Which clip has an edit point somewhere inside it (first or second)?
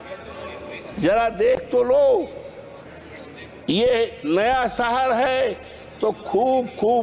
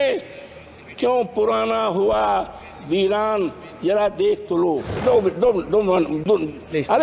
second